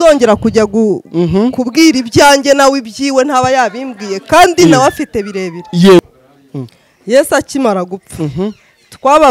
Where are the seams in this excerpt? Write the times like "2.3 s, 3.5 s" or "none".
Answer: 6.0 s